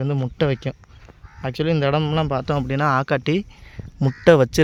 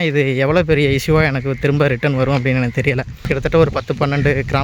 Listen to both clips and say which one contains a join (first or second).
second